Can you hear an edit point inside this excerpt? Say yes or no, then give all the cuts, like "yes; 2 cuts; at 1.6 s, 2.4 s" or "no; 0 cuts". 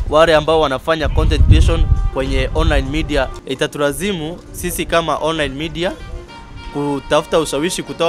yes; 1 cut; at 3.4 s